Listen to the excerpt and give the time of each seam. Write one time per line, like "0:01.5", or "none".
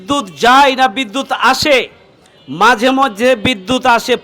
none